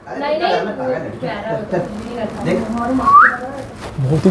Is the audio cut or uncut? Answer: uncut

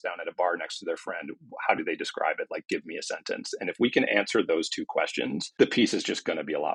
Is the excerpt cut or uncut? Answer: uncut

